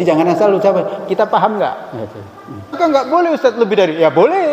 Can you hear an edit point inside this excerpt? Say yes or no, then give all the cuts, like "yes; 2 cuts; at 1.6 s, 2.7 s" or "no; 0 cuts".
yes; 1 cut; at 2.8 s